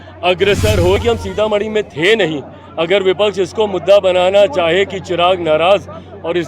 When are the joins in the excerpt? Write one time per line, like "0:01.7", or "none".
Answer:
0:01.0